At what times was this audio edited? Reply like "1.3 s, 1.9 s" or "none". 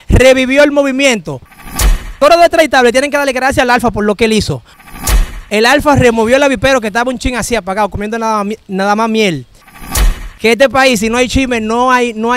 1.9 s, 4.9 s, 9.9 s